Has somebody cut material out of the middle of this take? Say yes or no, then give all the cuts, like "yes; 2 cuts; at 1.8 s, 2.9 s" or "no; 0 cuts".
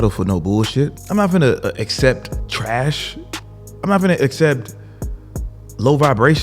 yes; 2 cuts; at 1.0 s, 2.3 s